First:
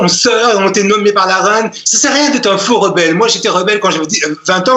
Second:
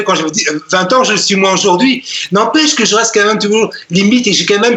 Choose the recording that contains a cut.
first; 1 cut; at 1.8 s

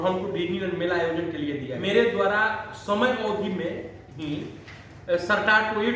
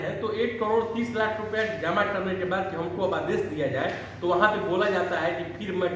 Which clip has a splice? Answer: first; 1 cut; at 1.7 s

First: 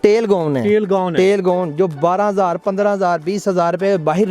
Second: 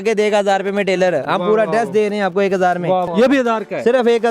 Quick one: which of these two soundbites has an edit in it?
second; 1 cut; at 3.1 s

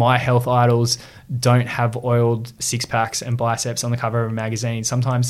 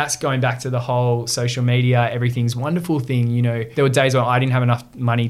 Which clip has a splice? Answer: second; 1 cut; at 3.7 s

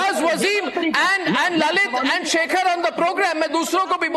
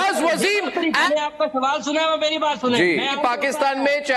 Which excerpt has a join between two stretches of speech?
second; 2 cuts; at 1.1 s, 3.1 s

